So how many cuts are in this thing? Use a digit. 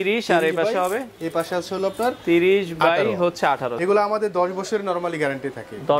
1